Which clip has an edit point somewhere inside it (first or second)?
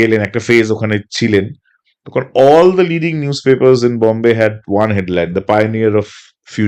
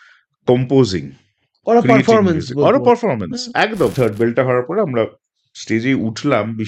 second